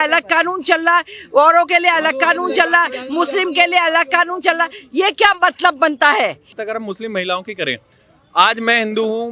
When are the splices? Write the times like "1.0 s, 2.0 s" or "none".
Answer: 6.6 s